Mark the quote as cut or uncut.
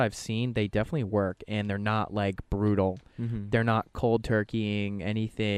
uncut